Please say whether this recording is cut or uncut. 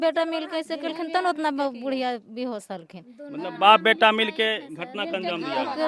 uncut